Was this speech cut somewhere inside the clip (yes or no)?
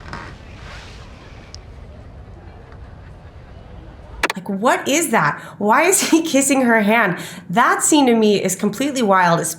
no